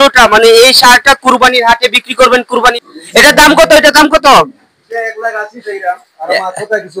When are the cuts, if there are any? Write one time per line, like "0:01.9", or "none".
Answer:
0:02.8